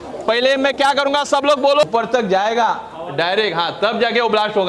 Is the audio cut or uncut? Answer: cut